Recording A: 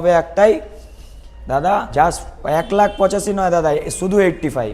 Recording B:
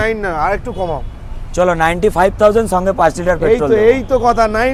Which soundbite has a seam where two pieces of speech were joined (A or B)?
A